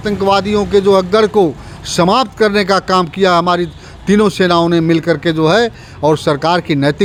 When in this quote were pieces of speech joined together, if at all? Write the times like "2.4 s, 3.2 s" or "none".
none